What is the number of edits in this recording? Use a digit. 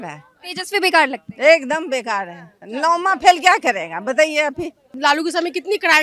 1